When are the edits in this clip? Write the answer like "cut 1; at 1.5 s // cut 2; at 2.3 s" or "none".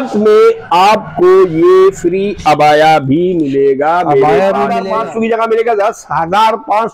cut 1; at 4.9 s